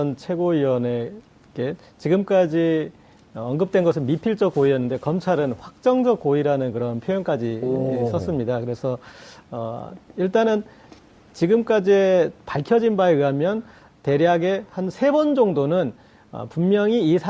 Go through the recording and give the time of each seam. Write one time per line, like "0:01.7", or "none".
0:15.1